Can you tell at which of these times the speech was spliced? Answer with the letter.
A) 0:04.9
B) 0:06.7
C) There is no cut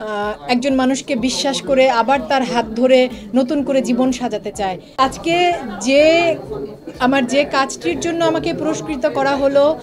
A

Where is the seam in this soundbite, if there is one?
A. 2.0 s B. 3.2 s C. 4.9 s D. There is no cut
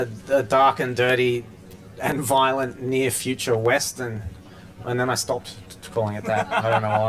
D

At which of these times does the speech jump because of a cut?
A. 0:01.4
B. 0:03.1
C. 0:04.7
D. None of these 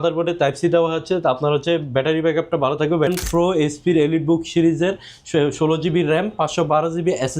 B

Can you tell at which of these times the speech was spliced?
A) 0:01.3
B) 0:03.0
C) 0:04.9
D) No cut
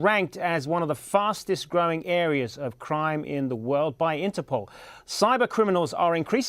B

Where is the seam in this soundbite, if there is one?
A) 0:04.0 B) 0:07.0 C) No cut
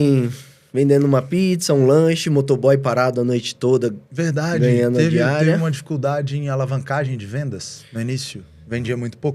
C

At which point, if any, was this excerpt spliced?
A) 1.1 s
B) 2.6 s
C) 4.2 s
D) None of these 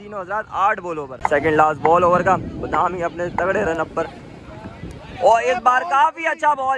A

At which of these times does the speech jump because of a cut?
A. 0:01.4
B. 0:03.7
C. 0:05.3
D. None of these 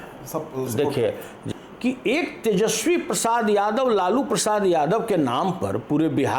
A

